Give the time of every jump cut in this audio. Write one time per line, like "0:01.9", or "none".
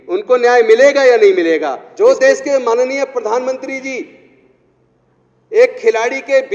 0:01.8